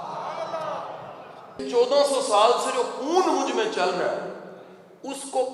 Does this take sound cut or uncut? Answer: cut